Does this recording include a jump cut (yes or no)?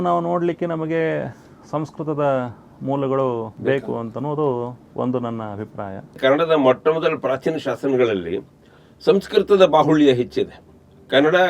yes